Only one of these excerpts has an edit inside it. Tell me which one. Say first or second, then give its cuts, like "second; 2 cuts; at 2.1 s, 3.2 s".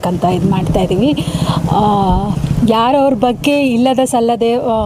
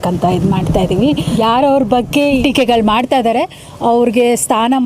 second; 2 cuts; at 1.3 s, 2.4 s